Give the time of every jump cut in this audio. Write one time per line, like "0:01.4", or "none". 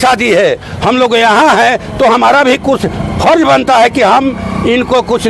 none